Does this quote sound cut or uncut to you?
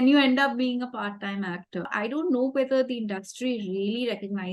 cut